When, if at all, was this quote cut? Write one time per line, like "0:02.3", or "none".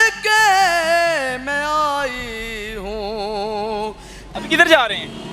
0:04.1